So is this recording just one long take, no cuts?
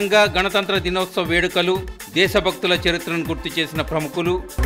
yes; 0 cuts

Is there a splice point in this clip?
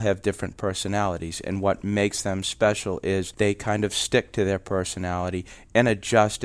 yes; 1 cut; at 3.3 s

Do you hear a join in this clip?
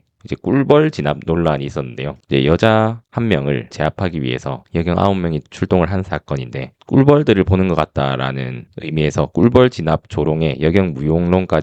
no; 0 cuts

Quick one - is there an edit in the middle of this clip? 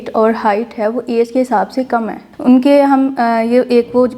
no; 0 cuts

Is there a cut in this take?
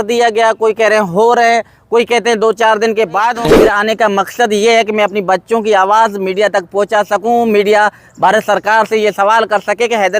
yes; 1 cut; at 3.5 s

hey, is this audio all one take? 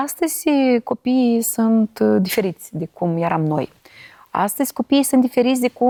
yes; 0 cuts

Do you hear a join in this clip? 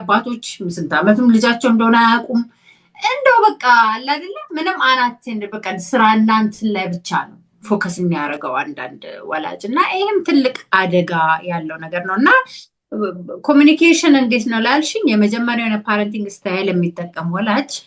no; 0 cuts

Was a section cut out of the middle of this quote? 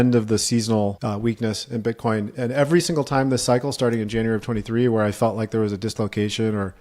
yes; 1 cut; at 1.0 s

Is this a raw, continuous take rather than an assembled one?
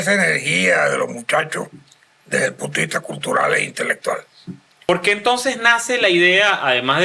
no; 1 cut; at 4.9 s

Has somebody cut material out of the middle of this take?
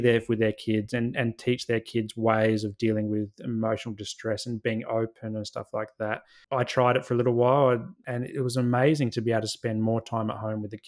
yes; 1 cut; at 6.3 s

